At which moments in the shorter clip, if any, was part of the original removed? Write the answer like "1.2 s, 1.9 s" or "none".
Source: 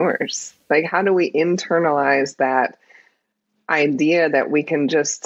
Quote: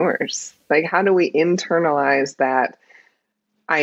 none